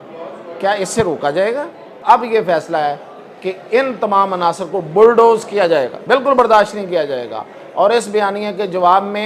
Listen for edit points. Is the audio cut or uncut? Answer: cut